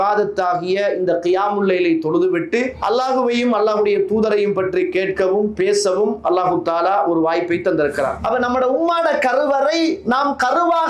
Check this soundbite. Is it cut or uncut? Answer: cut